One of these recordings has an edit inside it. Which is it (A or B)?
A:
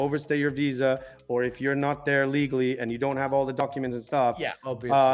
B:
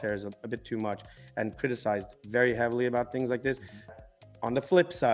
B